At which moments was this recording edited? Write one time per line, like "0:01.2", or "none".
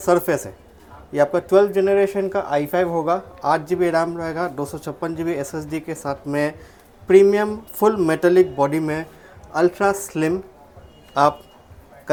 none